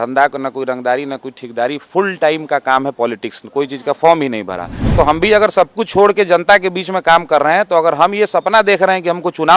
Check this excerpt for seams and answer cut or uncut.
cut